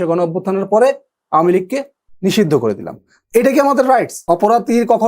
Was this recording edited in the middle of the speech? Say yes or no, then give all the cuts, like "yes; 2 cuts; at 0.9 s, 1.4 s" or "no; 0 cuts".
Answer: yes; 1 cut; at 4.1 s